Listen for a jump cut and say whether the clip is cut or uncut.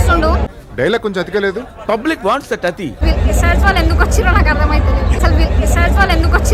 cut